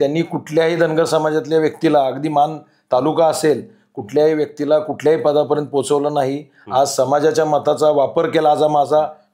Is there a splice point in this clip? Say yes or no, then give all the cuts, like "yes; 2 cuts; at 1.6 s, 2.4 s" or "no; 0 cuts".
no; 0 cuts